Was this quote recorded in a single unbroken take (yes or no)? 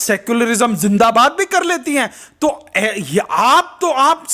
yes